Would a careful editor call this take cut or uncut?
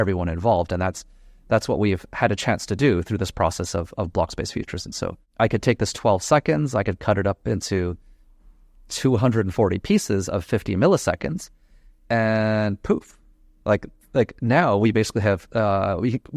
cut